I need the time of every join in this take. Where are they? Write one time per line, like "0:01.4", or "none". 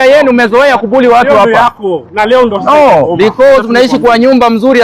none